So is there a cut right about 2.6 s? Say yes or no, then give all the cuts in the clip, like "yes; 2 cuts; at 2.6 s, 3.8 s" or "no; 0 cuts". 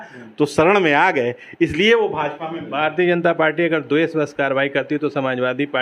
yes; 1 cut; at 2.6 s